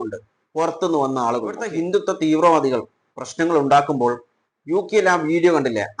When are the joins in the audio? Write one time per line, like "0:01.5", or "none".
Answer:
0:01.6